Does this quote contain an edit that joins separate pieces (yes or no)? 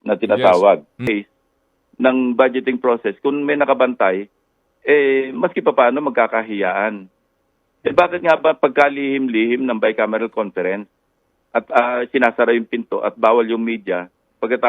yes